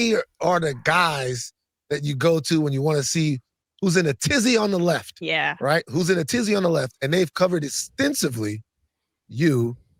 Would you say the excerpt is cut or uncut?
uncut